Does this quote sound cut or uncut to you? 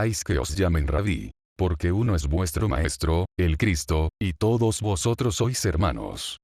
cut